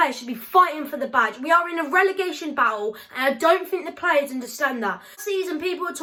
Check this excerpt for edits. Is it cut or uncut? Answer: uncut